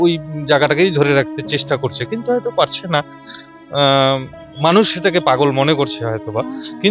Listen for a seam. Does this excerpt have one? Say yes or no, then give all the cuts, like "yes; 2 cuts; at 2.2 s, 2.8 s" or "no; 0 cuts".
no; 0 cuts